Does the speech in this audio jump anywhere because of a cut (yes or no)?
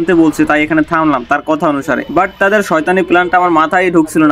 no